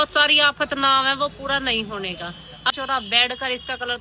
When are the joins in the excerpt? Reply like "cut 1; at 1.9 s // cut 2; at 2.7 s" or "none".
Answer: cut 1; at 2.7 s